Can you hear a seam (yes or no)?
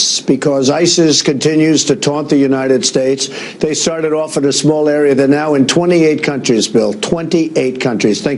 yes